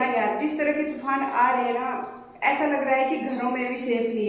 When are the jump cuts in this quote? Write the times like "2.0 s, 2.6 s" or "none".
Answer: none

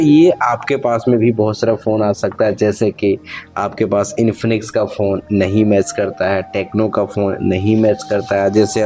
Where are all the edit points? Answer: none

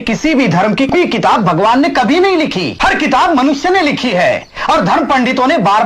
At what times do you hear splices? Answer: 0.9 s, 2.7 s

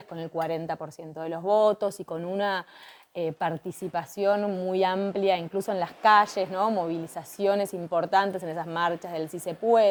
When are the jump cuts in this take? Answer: none

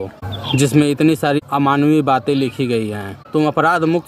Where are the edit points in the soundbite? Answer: 1.4 s, 3.2 s

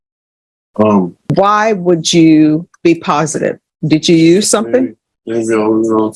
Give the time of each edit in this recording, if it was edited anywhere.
1.3 s, 2.7 s, 3.7 s

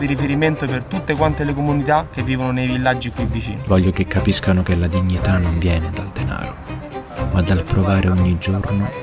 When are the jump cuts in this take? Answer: 3.6 s

